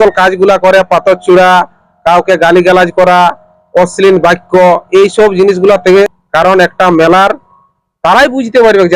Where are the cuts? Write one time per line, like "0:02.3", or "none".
0:06.1